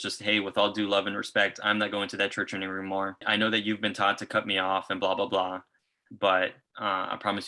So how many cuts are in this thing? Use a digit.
2